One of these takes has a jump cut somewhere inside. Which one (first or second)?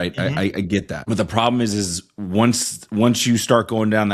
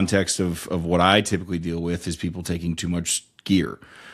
first